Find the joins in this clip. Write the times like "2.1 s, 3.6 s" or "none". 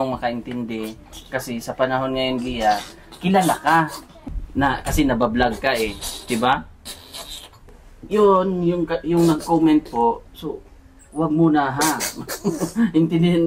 4.1 s, 7.9 s